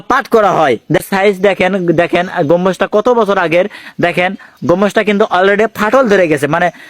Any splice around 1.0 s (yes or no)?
yes